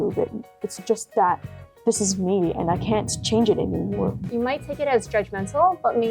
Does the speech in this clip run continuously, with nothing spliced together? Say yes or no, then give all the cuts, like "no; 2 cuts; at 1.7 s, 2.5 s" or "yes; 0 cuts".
no; 1 cut; at 4.2 s